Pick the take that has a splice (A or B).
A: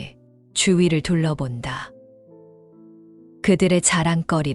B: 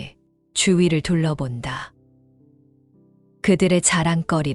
A